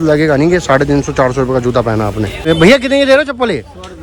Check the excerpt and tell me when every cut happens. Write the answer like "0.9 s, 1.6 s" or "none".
2.5 s